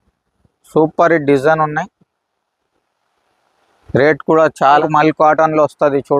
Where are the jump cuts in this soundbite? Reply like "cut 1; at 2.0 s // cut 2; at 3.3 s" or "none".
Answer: cut 1; at 4.8 s